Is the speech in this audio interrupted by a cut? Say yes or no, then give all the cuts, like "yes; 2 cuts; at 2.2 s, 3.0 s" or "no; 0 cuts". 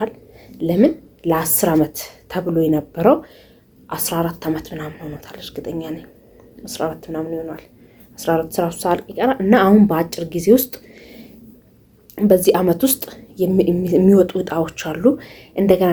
no; 0 cuts